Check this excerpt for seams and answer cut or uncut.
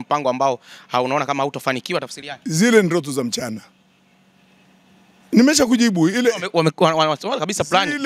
uncut